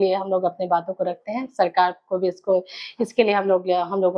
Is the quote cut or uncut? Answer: uncut